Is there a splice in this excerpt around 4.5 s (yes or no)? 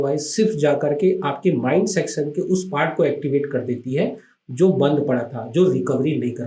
no